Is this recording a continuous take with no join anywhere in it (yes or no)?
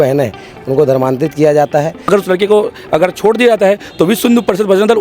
no